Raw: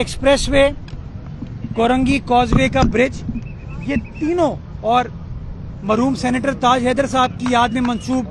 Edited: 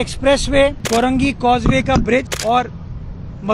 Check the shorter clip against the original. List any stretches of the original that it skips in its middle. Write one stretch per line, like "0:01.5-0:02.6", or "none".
0:00.8-0:01.7
0:03.2-0:04.7